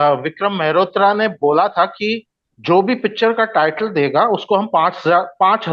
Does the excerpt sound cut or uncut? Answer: uncut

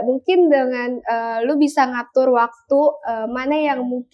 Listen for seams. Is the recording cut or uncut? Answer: uncut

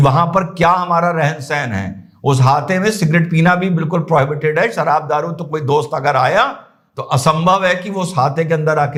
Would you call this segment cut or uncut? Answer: uncut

